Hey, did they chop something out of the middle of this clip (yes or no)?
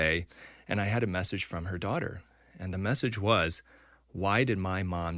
no